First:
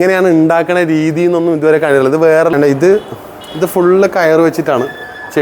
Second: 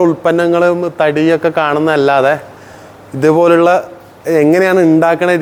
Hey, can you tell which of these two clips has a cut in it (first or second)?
first